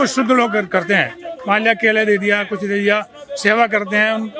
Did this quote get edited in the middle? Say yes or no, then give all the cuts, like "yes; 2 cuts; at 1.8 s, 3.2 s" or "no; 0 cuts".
no; 0 cuts